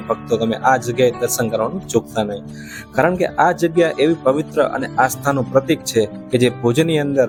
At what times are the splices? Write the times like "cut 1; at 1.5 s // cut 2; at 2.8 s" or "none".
none